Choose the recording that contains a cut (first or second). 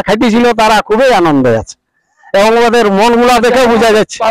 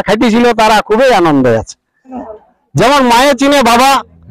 second